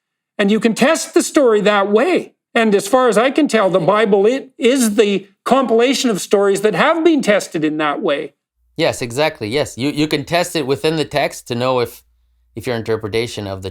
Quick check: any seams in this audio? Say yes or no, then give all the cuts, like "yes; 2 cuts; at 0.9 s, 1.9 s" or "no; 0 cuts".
yes; 1 cut; at 2.4 s